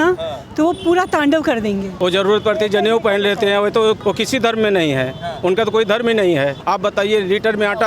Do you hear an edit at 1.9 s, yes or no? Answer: yes